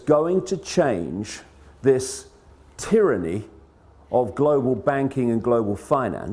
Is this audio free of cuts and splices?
yes; 0 cuts

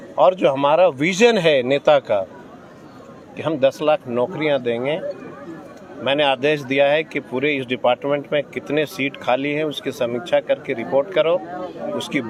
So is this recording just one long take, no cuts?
yes; 0 cuts

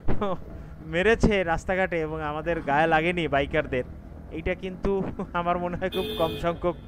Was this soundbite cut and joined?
no; 0 cuts

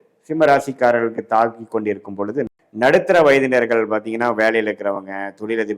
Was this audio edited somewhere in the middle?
yes; 1 cut; at 2.6 s

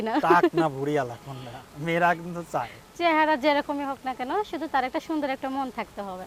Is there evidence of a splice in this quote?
no; 0 cuts

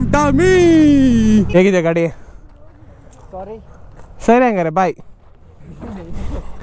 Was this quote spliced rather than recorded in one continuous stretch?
yes; 1 cut; at 1.5 s

